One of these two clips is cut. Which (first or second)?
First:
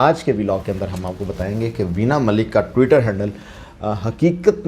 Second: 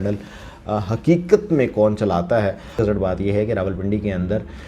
second